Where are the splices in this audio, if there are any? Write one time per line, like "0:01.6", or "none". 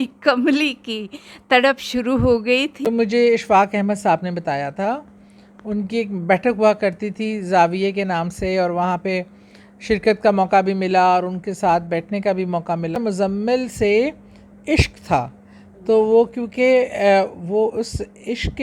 0:02.9
0:13.0